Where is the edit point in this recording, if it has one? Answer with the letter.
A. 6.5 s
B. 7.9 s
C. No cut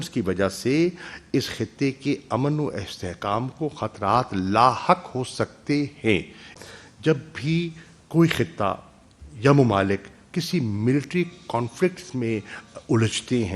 A